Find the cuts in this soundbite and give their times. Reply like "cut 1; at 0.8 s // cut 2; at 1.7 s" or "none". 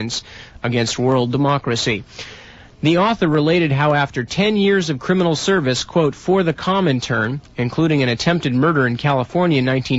cut 1; at 9.0 s